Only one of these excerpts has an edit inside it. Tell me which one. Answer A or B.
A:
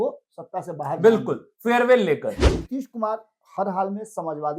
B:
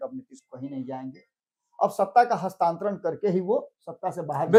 A